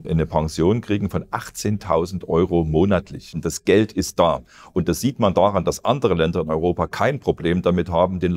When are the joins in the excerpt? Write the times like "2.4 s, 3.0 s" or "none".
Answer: 3.5 s

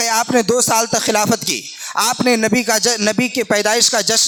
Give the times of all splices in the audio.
none

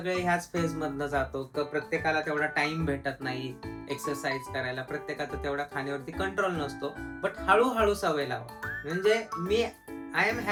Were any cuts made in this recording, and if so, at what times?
none

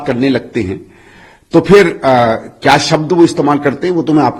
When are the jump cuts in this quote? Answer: none

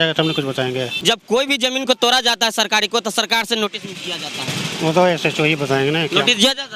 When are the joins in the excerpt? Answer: 0.9 s

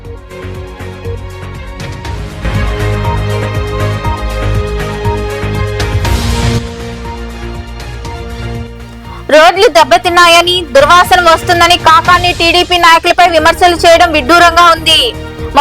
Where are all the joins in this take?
1.1 s

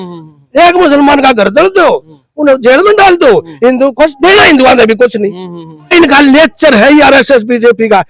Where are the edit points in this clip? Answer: 5.9 s

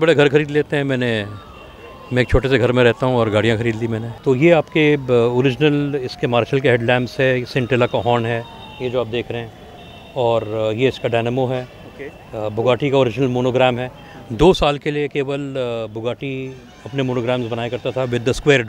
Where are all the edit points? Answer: 4.1 s

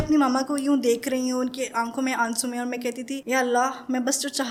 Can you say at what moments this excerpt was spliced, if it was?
none

